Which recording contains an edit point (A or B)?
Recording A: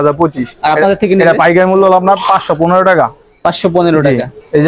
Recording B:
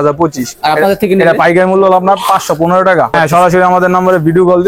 B